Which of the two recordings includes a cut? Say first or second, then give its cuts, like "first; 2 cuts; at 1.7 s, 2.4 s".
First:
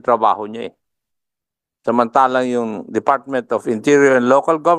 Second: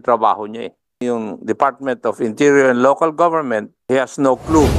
second; 2 cuts; at 1.0 s, 3.8 s